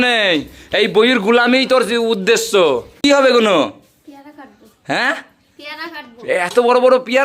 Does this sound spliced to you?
yes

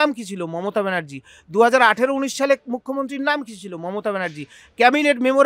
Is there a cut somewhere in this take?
no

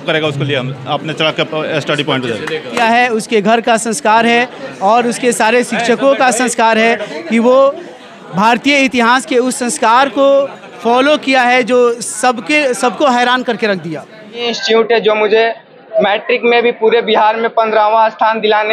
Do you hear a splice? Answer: yes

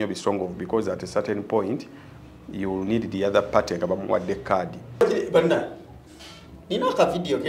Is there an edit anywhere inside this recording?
yes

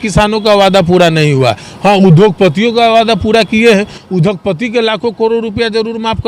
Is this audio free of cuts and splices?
yes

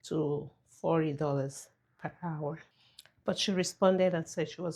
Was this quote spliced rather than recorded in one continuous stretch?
no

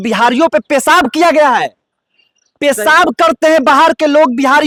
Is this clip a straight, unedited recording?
yes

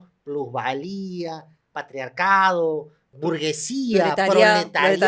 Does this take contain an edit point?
yes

